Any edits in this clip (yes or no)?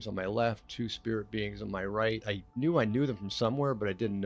yes